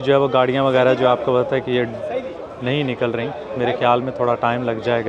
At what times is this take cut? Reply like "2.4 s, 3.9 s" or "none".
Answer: none